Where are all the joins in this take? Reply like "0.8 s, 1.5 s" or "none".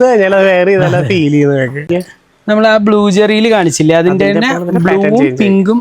1.8 s